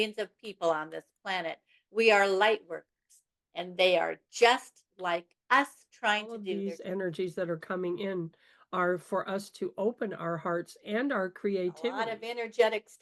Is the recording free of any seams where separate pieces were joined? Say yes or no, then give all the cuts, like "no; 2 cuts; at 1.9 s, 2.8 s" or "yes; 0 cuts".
no; 2 cuts; at 6.5 s, 12.0 s